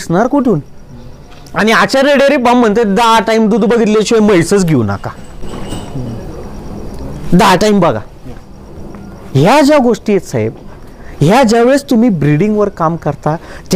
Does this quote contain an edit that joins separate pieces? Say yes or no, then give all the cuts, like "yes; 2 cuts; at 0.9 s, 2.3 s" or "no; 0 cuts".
no; 0 cuts